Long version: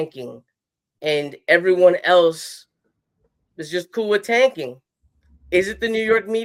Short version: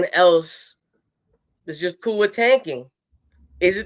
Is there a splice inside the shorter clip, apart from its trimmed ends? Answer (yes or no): no